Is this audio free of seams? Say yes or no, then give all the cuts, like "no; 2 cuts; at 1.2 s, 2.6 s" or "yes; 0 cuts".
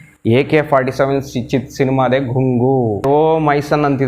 no; 1 cut; at 3.0 s